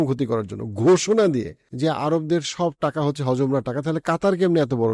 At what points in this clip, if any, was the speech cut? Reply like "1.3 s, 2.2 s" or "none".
1.6 s